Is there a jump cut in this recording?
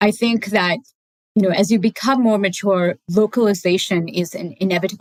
no; 0 cuts

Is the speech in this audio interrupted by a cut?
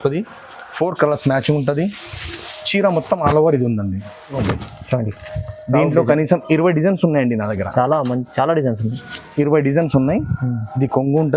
yes; 1 cut; at 4.3 s

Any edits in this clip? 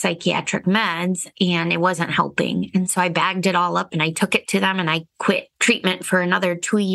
yes; 1 cut; at 1.3 s

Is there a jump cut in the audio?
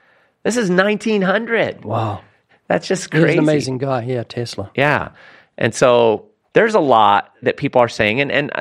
yes; 3 cuts; at 2.4 s, 6.3 s, 7.4 s

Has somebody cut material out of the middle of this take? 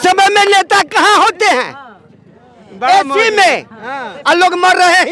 no; 0 cuts

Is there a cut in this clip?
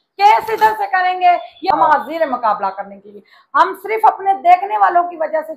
yes; 1 cut; at 1.7 s

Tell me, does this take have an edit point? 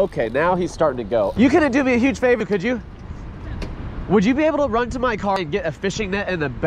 yes; 2 cuts; at 1.3 s, 5.4 s

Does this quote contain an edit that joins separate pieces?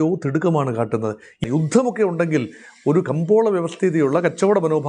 yes; 1 cut; at 1.4 s

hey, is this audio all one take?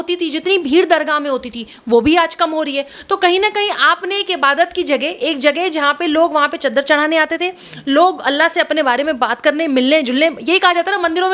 yes; 0 cuts

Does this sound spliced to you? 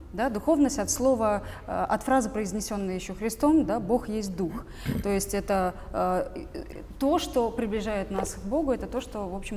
no; 0 cuts

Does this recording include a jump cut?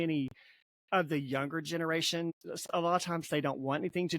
yes; 1 cut; at 2.3 s

